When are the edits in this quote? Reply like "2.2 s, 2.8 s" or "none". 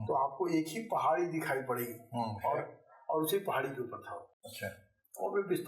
none